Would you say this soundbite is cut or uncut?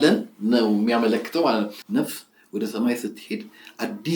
cut